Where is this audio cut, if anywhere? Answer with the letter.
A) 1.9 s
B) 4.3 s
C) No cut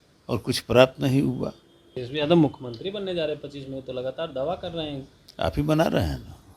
A